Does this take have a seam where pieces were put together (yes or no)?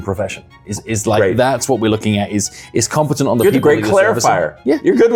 no